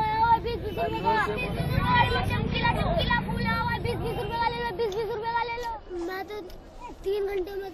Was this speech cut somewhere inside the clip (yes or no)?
yes